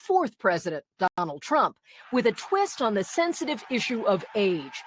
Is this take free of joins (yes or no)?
yes